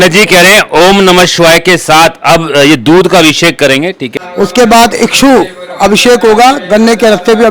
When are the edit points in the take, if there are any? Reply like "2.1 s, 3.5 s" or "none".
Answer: 4.1 s